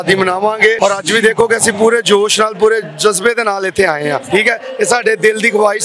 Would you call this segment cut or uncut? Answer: cut